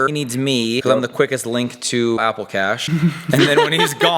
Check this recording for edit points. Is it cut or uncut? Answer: cut